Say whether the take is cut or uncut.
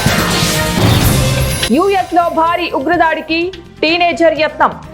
uncut